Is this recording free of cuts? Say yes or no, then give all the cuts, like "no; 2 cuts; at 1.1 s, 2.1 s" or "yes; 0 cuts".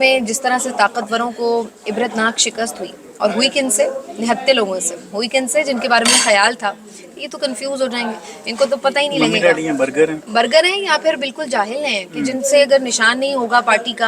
yes; 0 cuts